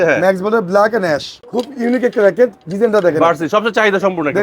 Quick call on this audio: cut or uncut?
cut